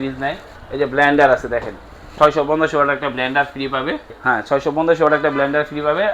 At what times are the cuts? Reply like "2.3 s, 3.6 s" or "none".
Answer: 2.0 s, 4.2 s

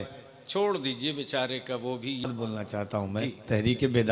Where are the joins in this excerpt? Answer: 2.3 s

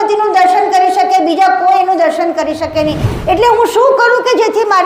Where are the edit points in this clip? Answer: 3.1 s

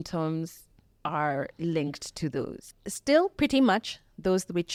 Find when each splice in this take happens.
none

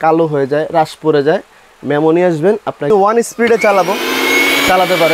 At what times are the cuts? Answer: 2.9 s

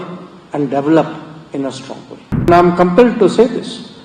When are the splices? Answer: 2.5 s

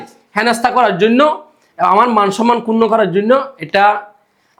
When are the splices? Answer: none

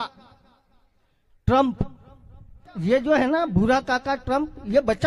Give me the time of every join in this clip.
2.7 s

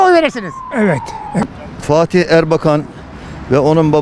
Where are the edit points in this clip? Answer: 1.3 s

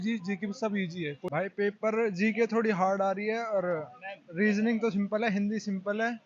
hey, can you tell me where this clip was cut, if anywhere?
1.2 s

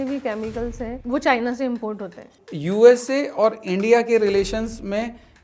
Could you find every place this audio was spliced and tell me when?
1.0 s, 2.4 s

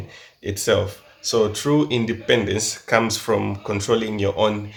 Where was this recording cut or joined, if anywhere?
none

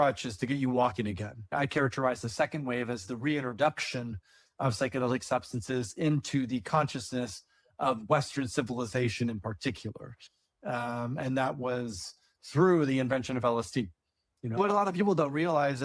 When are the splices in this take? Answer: 1.5 s, 14.6 s

